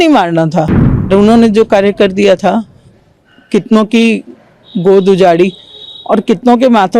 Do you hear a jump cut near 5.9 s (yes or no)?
no